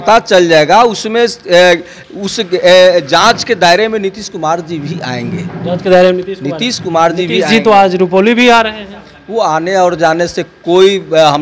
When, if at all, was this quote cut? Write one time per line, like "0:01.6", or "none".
none